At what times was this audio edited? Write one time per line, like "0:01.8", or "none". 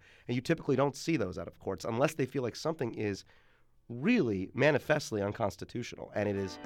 0:01.5